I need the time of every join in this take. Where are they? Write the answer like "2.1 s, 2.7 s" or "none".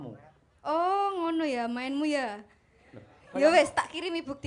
none